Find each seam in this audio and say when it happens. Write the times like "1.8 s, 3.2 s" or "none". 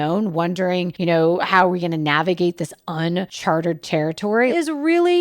0.9 s, 3.3 s, 4.5 s